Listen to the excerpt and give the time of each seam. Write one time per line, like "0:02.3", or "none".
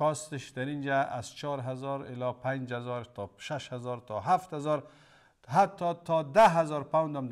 none